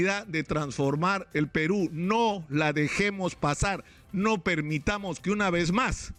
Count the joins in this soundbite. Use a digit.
0